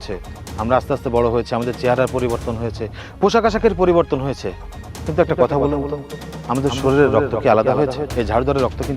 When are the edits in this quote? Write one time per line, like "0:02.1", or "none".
0:08.0